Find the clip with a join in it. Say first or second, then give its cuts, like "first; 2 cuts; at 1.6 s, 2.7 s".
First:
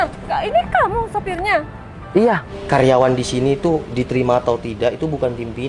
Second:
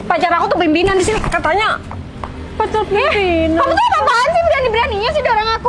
first; 1 cut; at 2.5 s